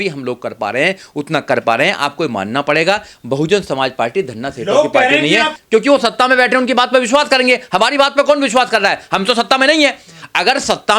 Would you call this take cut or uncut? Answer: cut